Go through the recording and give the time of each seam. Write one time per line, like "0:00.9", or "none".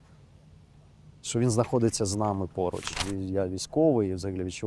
0:02.9